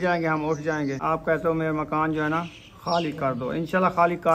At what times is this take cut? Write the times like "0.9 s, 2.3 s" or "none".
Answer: 1.0 s

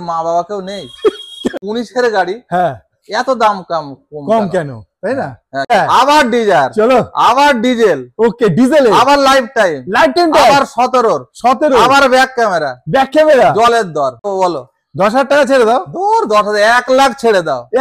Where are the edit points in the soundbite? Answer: 1.6 s, 5.7 s, 14.3 s

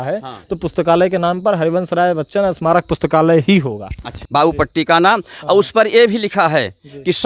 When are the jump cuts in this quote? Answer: 4.1 s

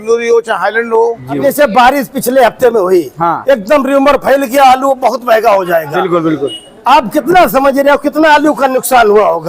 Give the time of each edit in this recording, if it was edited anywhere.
1.4 s

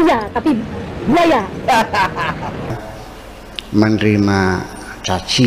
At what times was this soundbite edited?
2.7 s

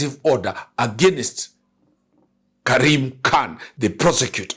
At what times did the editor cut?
3.7 s

